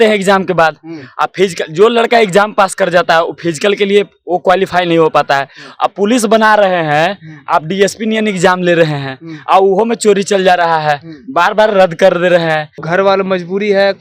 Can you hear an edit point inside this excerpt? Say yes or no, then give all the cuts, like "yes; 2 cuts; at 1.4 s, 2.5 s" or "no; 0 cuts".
yes; 1 cut; at 12.8 s